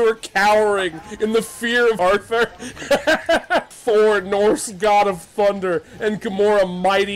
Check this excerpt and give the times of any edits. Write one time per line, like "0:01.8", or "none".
0:02.0
0:03.7